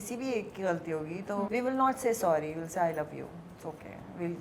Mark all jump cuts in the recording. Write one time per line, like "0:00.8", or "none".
0:01.5